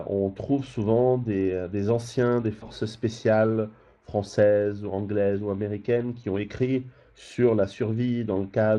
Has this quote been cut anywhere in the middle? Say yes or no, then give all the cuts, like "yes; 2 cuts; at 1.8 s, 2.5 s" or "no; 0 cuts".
no; 0 cuts